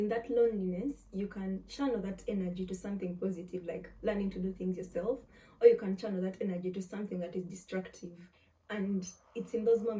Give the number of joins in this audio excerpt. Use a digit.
1